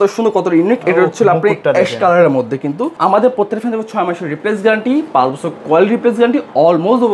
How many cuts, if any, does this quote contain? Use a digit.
1